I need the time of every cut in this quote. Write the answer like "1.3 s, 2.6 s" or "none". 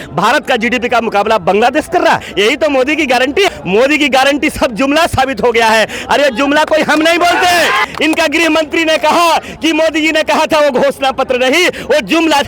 2.3 s, 3.5 s, 7.9 s